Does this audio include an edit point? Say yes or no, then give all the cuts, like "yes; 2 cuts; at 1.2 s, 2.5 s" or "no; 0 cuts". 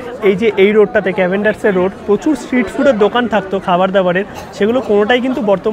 no; 0 cuts